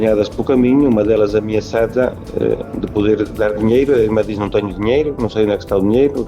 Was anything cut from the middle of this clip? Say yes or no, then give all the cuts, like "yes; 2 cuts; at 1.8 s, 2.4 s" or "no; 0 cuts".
no; 0 cuts